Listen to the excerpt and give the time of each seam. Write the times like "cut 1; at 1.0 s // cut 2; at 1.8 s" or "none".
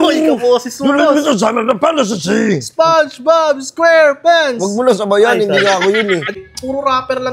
cut 1; at 6.4 s